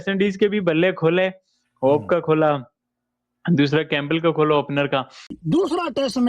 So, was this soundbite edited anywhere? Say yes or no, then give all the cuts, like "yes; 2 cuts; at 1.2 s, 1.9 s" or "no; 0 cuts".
yes; 1 cut; at 5.4 s